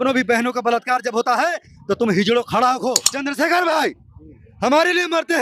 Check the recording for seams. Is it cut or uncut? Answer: cut